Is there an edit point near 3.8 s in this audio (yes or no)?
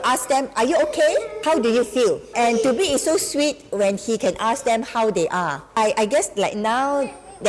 no